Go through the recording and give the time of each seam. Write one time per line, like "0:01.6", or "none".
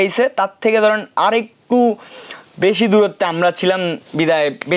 none